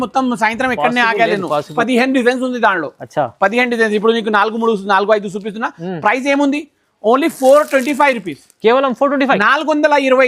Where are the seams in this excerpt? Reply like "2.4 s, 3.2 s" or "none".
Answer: 1.7 s